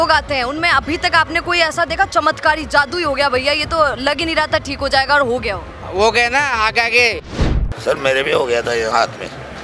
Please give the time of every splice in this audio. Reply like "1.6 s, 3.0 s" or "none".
7.2 s